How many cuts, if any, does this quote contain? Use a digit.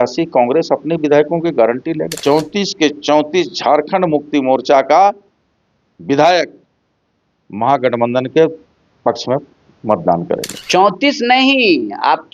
2